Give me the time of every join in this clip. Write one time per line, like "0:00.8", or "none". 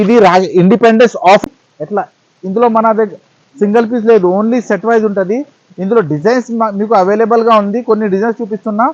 0:01.4